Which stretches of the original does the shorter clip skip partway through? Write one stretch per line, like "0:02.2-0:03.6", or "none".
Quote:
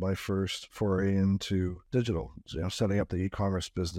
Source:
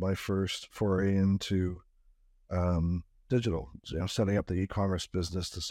0:01.8-0:03.2